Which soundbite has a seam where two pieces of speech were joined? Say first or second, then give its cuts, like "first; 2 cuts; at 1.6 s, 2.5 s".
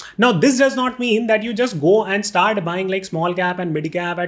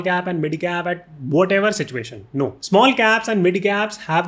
second; 1 cut; at 2.6 s